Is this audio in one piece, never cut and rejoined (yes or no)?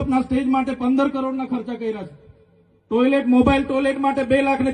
yes